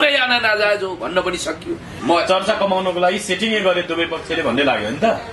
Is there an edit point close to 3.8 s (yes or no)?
no